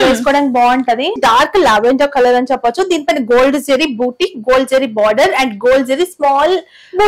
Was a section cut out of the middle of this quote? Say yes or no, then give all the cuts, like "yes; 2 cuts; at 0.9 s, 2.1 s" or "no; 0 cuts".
yes; 1 cut; at 1.2 s